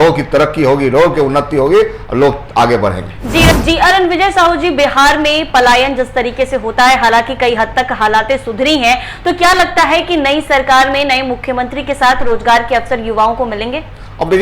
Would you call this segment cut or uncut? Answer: cut